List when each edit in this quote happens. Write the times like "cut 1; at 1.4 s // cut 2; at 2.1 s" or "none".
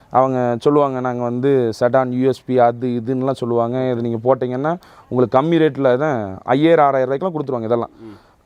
none